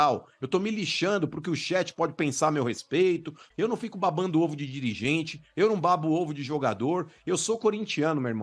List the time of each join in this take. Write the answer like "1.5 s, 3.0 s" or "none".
3.4 s